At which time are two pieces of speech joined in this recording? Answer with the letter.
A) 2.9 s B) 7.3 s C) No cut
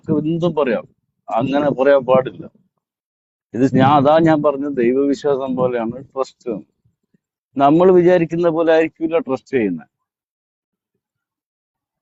C